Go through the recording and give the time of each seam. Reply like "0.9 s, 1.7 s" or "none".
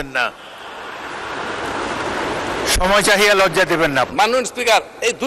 4.1 s